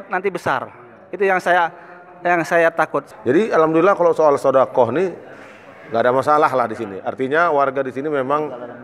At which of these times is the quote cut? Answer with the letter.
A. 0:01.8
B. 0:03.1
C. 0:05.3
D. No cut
B